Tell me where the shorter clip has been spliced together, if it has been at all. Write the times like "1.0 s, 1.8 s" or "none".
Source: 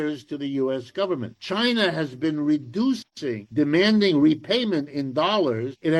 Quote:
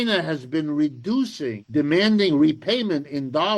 1.4 s